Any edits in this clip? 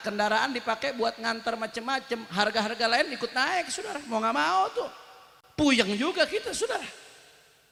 no; 0 cuts

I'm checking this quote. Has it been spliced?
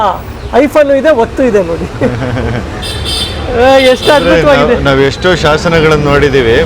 no; 0 cuts

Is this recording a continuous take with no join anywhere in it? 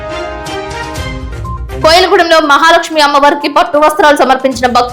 no; 1 cut; at 1.4 s

